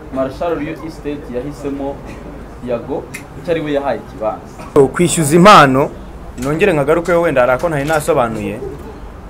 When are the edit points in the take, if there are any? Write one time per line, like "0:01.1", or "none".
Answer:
0:04.8